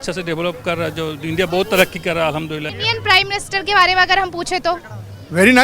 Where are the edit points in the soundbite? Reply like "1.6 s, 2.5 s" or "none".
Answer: 2.7 s